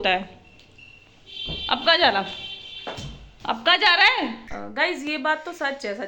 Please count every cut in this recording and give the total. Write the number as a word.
one